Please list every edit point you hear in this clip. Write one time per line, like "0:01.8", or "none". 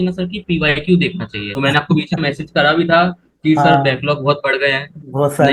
0:01.5